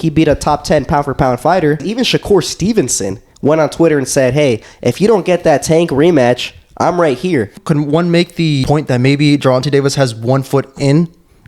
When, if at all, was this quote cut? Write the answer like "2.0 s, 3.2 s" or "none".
1.9 s, 7.6 s, 8.6 s

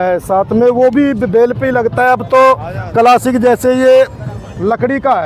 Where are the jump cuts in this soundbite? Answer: none

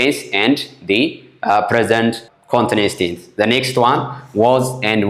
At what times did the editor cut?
none

